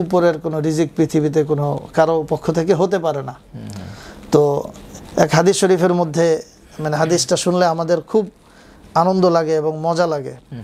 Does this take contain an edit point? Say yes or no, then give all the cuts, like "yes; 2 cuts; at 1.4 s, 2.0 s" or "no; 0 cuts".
no; 0 cuts